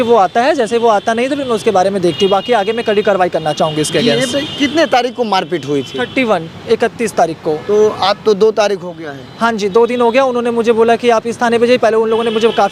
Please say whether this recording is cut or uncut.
uncut